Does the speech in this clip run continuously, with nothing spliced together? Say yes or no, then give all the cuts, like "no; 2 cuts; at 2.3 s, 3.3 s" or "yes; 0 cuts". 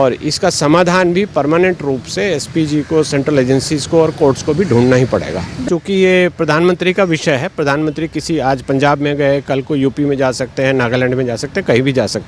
no; 1 cut; at 5.6 s